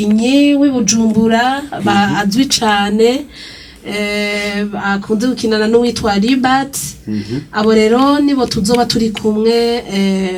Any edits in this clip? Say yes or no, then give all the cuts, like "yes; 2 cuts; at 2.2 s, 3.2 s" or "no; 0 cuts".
no; 0 cuts